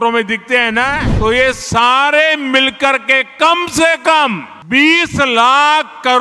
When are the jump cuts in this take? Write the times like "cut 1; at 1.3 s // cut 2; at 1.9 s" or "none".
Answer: cut 1; at 1.1 s // cut 2; at 4.5 s